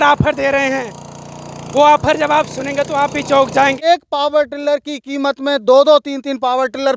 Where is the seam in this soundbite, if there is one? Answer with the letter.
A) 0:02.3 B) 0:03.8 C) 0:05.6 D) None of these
B